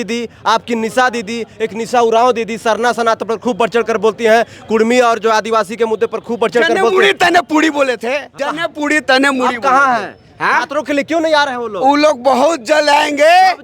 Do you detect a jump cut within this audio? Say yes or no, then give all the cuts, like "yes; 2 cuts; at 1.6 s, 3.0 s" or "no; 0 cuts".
yes; 1 cut; at 8.4 s